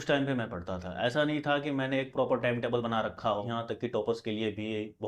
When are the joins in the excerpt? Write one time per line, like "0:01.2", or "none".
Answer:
0:03.5